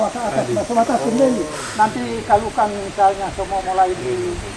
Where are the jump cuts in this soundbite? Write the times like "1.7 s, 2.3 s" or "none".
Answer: 1.5 s